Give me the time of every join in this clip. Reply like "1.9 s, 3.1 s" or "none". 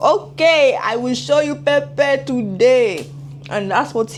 none